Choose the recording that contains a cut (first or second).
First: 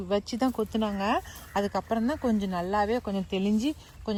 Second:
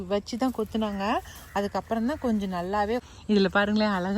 second